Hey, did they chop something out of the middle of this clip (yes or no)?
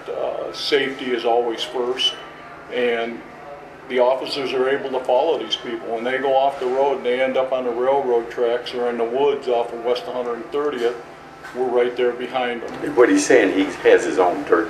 no